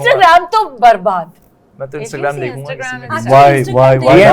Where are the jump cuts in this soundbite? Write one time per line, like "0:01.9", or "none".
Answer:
none